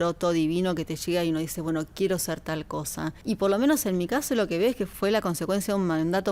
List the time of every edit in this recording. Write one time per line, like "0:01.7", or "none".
0:03.2
0:04.9